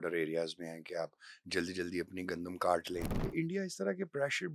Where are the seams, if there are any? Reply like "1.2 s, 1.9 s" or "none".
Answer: 3.2 s